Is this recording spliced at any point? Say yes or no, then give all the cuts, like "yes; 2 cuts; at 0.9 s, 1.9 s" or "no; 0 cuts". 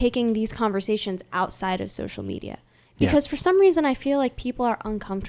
no; 0 cuts